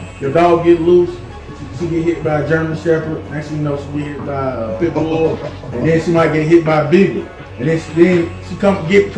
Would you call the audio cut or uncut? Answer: uncut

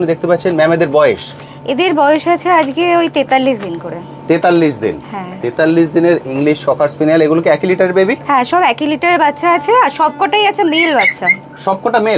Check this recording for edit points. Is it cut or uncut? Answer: uncut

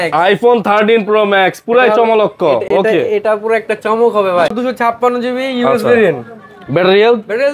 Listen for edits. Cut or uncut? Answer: cut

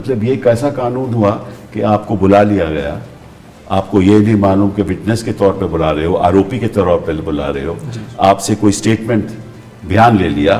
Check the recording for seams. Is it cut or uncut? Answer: uncut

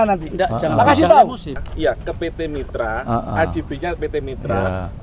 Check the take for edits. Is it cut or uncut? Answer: cut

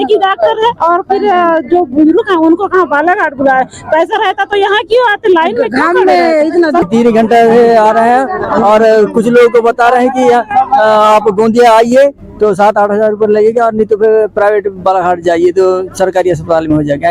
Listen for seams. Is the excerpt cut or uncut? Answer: cut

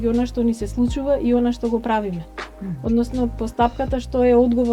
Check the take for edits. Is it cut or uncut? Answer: uncut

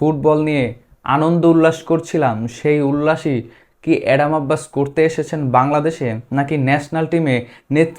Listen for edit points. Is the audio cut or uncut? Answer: uncut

